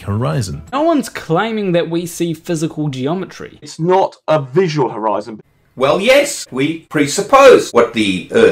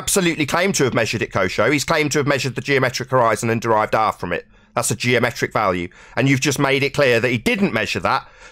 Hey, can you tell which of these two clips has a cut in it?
first; 5 cuts; at 0.7 s, 3.7 s, 5.4 s, 6.6 s, 7.7 s

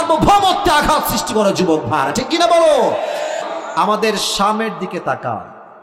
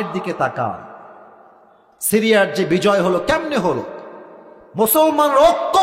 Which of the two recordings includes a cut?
first; 1 cut; at 3.5 s

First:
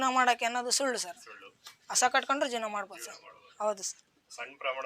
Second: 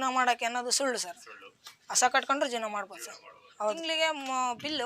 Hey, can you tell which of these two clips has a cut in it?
second; 1 cut; at 3.8 s

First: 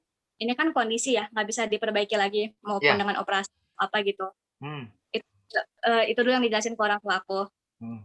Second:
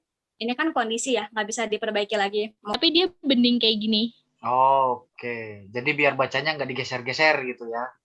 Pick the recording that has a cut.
second; 1 cut; at 2.8 s

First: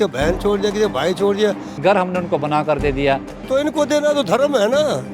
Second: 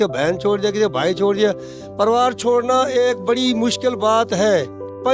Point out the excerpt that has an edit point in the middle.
first; 2 cuts; at 1.7 s, 3.3 s

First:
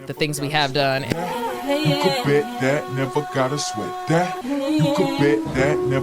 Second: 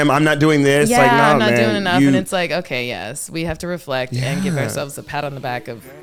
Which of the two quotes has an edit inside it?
first; 1 cut; at 1.1 s

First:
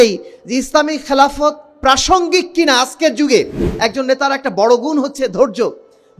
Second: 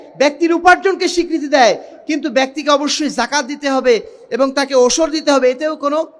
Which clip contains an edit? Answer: first; 1 cut; at 3.7 s

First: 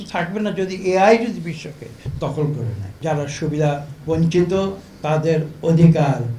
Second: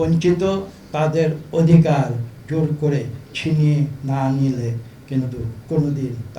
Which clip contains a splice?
first; 1 cut; at 2.9 s

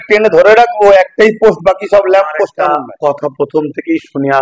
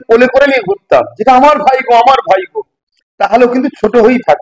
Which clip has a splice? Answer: first; 1 cut; at 2.6 s

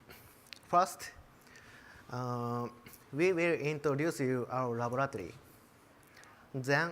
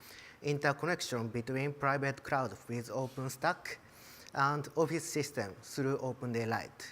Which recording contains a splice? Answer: first; 1 cut; at 2.9 s

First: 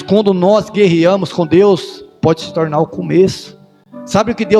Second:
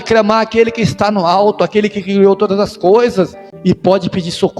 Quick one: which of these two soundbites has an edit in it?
second; 1 cut; at 3.5 s

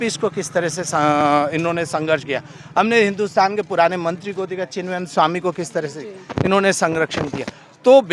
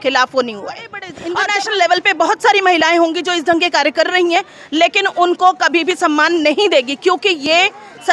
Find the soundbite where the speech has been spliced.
second; 1 cut; at 1.1 s

